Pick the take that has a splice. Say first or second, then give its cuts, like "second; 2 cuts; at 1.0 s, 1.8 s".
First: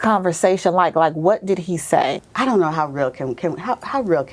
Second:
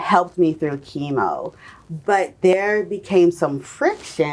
first; 1 cut; at 2.2 s